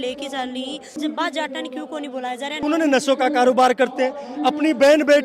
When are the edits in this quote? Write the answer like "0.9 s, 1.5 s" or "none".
1.0 s, 2.6 s